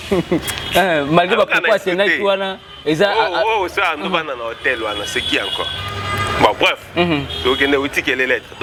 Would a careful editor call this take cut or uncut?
uncut